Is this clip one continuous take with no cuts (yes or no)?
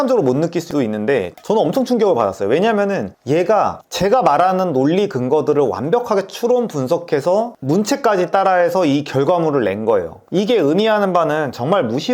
yes